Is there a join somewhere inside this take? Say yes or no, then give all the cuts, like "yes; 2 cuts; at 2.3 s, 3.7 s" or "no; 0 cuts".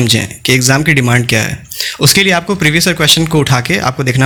no; 0 cuts